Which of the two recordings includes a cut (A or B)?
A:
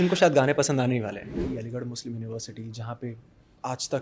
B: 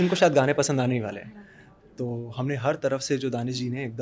A